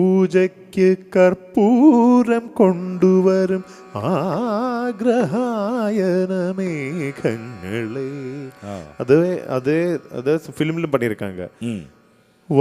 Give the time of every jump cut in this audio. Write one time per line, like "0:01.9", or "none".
none

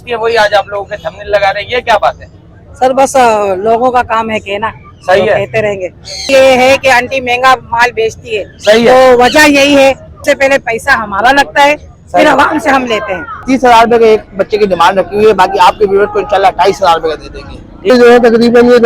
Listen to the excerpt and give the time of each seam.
0:06.1
0:10.1
0:13.4
0:17.9

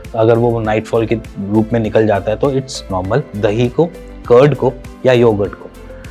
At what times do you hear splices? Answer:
0:03.3

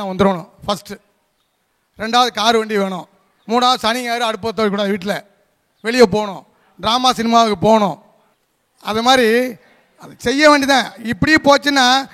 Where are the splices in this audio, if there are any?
none

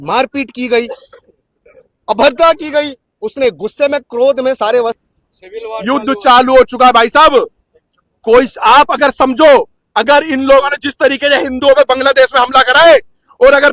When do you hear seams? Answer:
0:05.0

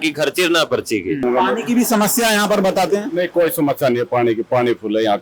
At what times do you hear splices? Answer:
0:01.2

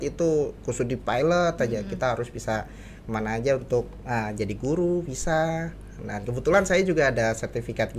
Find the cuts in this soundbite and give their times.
none

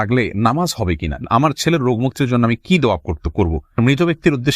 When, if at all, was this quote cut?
0:01.2
0:03.8

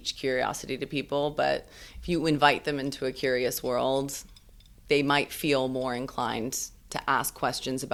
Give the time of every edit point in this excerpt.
none

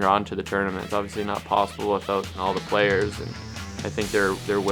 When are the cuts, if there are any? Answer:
0:00.9
0:02.3

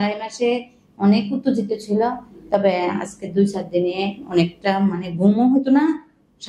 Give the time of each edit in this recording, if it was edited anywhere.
none

